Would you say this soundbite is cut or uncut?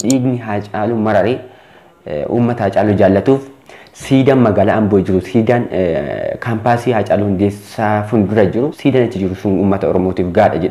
cut